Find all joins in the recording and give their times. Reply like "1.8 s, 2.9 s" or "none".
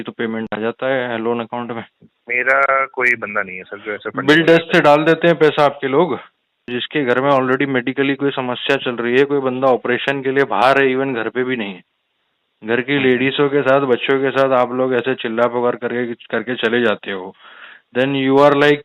6.8 s